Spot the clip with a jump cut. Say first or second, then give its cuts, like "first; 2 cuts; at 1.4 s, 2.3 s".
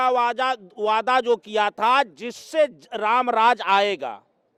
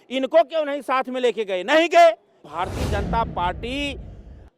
second; 1 cut; at 2.4 s